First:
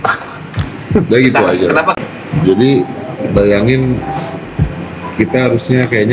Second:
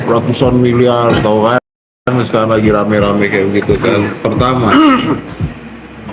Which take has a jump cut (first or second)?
first